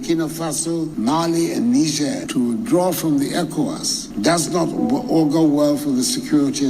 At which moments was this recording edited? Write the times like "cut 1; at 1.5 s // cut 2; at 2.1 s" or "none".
cut 1; at 0.9 s // cut 2; at 2.2 s